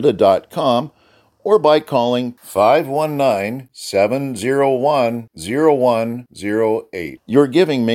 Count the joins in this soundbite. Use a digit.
0